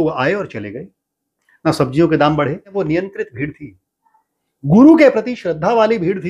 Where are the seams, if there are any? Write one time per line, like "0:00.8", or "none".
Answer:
0:02.7